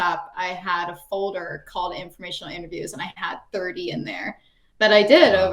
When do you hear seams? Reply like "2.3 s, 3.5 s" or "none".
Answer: none